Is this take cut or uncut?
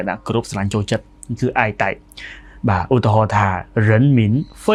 uncut